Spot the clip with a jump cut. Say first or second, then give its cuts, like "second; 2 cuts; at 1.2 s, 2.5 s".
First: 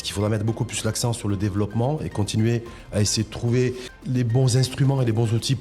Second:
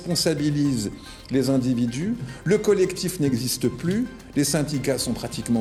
first; 1 cut; at 3.9 s